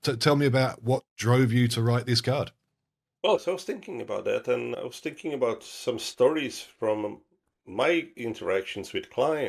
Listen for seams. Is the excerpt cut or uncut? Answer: cut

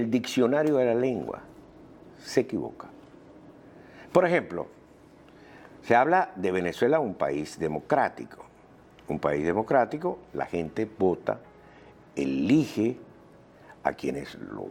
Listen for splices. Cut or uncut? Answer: cut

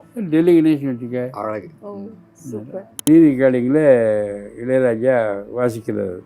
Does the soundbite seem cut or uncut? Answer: cut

